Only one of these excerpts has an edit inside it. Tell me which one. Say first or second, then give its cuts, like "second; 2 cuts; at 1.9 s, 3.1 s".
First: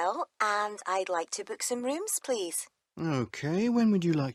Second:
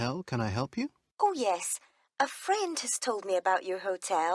second; 1 cut; at 1.0 s